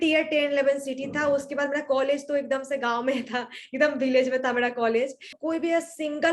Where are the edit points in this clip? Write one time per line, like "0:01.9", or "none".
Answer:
0:05.3